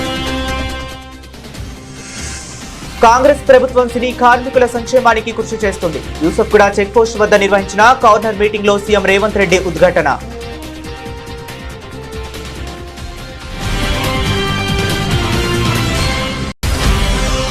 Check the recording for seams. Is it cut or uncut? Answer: cut